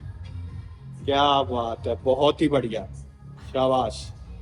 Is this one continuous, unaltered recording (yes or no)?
yes